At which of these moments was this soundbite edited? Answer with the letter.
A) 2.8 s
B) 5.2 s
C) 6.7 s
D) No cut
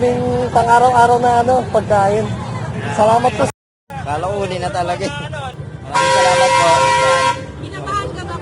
D